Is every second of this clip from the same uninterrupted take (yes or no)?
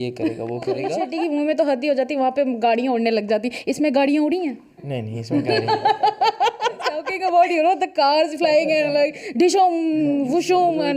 no